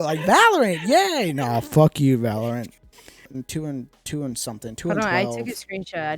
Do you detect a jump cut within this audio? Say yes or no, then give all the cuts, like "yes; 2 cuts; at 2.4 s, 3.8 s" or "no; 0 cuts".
yes; 1 cut; at 3.3 s